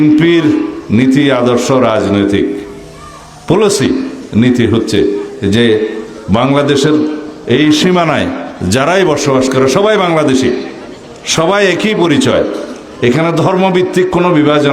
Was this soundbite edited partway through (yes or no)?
no